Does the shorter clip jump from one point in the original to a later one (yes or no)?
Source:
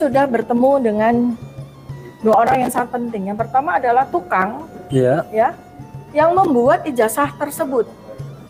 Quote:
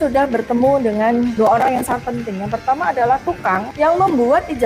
yes